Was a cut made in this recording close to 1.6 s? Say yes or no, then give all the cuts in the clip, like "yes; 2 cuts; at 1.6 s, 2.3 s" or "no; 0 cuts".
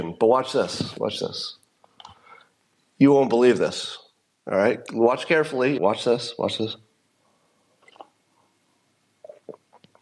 no; 1 cut; at 5.8 s